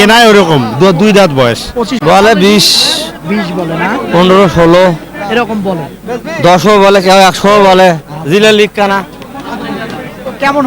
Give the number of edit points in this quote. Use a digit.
1